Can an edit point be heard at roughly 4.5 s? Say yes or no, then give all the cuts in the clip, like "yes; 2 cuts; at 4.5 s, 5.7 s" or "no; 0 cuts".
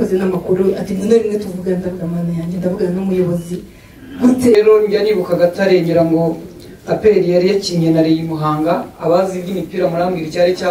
yes; 1 cut; at 4.5 s